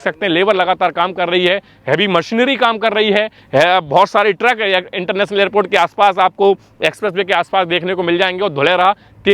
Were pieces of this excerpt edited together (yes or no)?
no